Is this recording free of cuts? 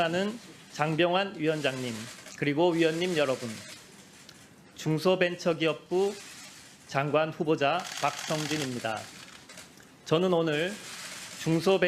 no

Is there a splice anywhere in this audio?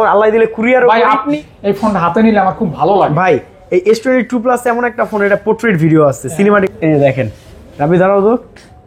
yes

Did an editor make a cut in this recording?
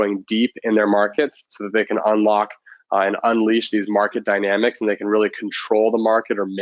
no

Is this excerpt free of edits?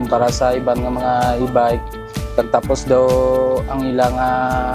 yes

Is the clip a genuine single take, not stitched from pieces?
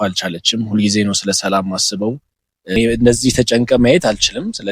no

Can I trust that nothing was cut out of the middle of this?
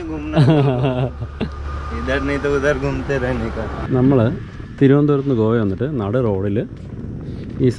no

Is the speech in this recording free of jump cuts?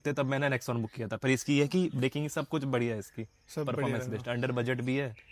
yes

